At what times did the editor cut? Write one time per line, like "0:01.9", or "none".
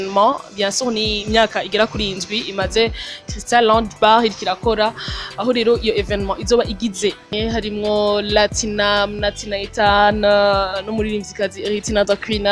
0:07.3

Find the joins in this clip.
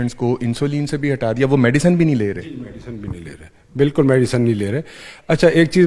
none

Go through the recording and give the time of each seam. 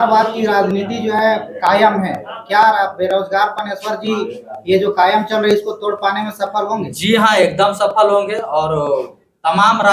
none

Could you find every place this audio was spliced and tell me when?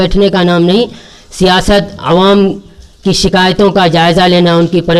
none

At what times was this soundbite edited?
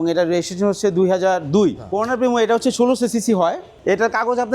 0:01.9
0:03.7

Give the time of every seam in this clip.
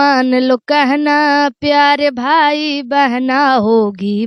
none

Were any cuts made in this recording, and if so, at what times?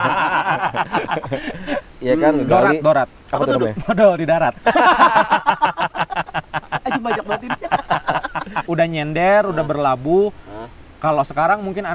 0:01.9
0:08.7

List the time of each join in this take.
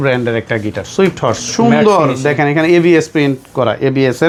none

